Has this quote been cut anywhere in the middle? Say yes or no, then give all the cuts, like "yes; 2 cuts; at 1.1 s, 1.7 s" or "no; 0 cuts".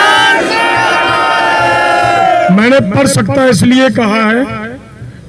no; 0 cuts